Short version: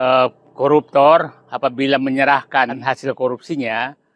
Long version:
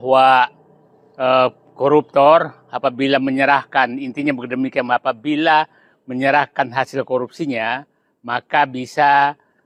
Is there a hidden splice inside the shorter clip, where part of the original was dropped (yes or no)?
yes